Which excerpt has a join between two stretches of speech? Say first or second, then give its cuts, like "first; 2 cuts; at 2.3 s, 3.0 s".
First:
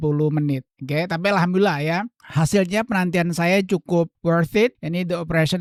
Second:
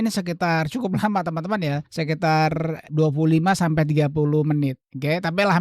second; 2 cuts; at 1.9 s, 2.9 s